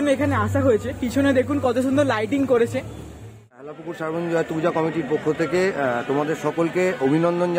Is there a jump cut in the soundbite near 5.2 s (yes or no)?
no